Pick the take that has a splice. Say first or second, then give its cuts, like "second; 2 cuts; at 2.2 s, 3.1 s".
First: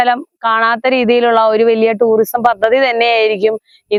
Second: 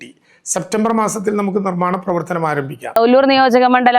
second; 1 cut; at 3.0 s